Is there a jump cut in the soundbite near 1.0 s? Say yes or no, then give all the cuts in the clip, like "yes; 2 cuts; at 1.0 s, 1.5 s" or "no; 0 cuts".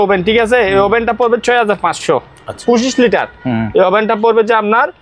no; 1 cut; at 2.6 s